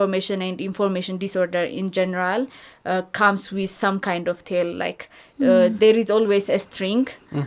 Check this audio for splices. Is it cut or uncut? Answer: uncut